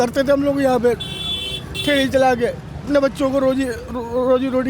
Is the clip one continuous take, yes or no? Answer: no